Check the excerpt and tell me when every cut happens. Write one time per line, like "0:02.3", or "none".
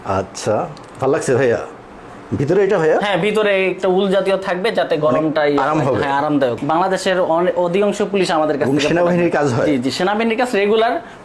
0:06.6